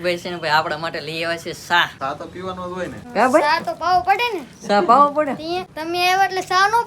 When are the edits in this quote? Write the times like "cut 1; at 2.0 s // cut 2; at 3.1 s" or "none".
cut 1; at 1.9 s // cut 2; at 3.0 s // cut 3; at 5.7 s